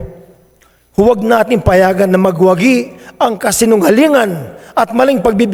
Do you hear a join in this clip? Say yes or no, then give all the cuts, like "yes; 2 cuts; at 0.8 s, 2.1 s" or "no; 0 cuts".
no; 0 cuts